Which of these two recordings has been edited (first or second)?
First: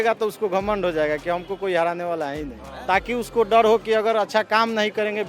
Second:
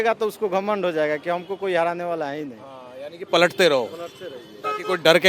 first